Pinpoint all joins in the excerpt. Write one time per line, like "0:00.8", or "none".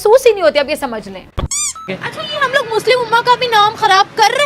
0:01.8

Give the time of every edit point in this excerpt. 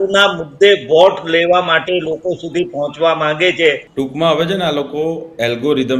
0:03.9

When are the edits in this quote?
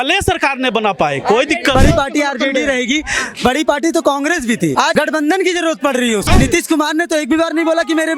0:01.7
0:04.8
0:06.3

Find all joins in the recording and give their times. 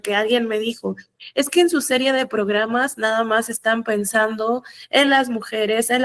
none

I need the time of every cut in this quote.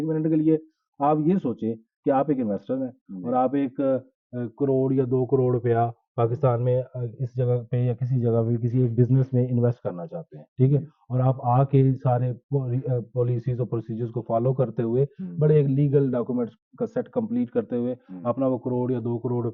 none

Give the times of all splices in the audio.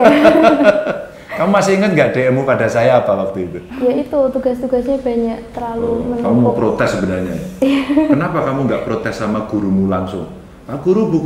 0:03.6

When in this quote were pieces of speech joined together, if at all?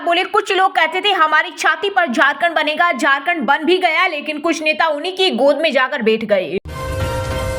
0:06.6

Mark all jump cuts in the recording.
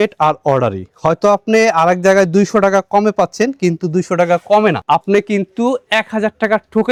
none

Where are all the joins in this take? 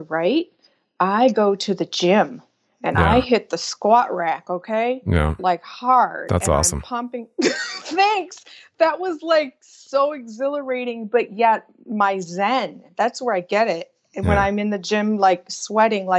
none

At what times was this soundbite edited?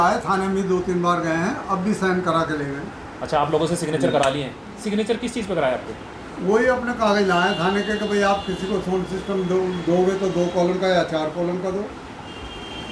none

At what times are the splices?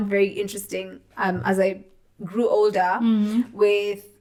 none

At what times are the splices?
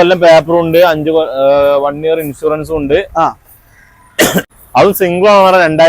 0:04.5

